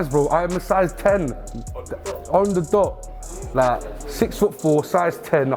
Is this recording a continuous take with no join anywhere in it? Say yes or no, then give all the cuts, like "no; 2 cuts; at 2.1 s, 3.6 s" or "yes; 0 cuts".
yes; 0 cuts